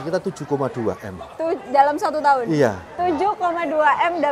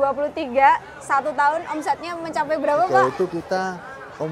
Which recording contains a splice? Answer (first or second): second